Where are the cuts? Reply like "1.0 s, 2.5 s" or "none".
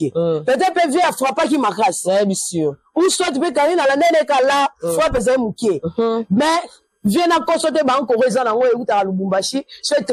none